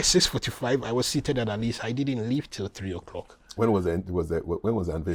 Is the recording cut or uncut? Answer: uncut